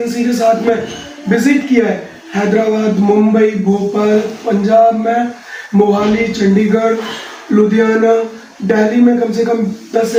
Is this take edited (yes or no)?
no